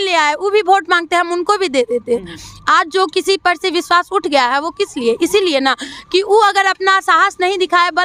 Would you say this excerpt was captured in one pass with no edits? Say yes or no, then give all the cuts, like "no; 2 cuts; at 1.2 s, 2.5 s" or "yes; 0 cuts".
yes; 0 cuts